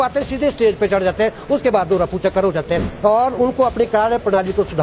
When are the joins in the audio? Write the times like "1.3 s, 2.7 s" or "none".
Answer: 2.9 s